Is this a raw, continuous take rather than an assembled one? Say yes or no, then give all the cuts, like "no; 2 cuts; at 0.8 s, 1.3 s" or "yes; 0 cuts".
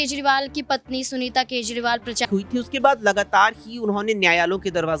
no; 1 cut; at 2.3 s